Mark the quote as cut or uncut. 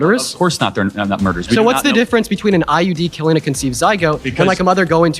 cut